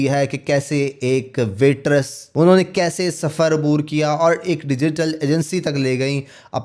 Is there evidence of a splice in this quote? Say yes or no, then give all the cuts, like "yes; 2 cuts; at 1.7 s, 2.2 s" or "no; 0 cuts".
yes; 1 cut; at 2.2 s